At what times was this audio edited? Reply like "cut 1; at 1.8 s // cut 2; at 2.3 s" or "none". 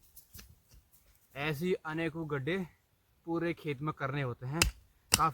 cut 1; at 1.2 s